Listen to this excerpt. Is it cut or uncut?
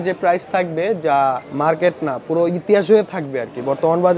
cut